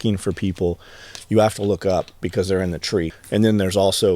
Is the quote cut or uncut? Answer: cut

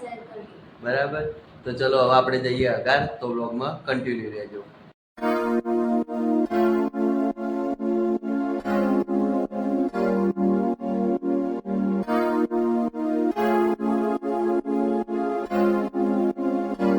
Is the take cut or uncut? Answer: uncut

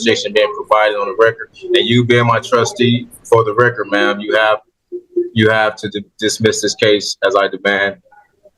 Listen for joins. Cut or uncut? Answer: uncut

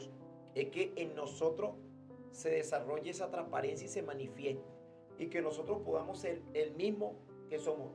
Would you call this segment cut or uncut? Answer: uncut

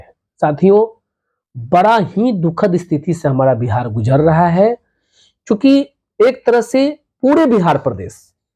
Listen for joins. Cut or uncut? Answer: uncut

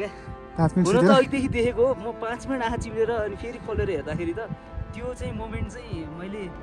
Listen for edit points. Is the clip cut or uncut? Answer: uncut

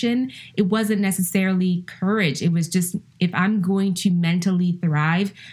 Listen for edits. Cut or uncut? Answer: uncut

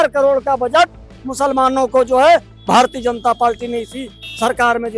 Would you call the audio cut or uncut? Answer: uncut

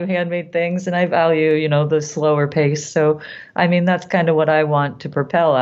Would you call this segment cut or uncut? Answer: uncut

